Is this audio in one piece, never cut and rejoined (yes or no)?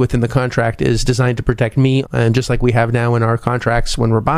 no